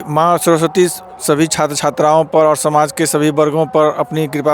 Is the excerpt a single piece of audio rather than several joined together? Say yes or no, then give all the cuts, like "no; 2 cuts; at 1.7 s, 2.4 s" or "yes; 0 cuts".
yes; 0 cuts